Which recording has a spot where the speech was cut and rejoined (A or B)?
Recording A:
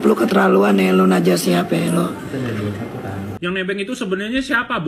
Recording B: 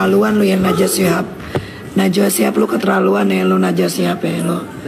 A